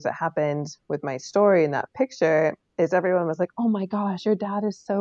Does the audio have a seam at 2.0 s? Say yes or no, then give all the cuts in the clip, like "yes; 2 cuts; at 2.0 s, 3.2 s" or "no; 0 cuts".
no; 0 cuts